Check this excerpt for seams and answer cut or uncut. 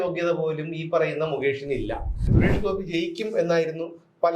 cut